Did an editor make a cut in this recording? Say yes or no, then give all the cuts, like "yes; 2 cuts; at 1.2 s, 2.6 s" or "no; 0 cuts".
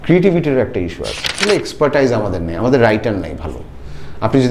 yes; 1 cut; at 1.4 s